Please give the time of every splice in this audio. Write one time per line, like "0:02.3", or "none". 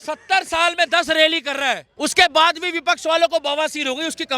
0:01.9